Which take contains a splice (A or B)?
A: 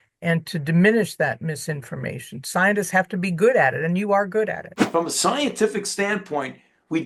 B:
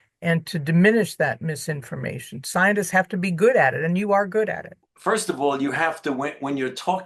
A